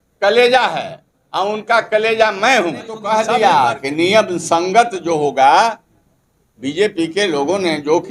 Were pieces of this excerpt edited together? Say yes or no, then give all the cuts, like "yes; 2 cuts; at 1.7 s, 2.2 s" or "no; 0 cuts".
yes; 1 cut; at 3.1 s